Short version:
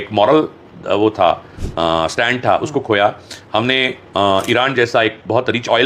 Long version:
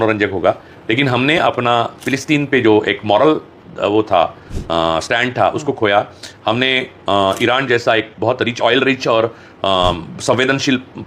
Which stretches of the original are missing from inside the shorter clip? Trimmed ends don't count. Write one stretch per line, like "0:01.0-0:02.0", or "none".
none